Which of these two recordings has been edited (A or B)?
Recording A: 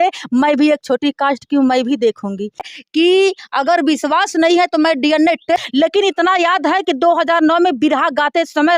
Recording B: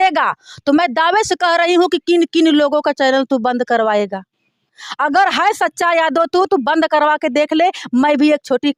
A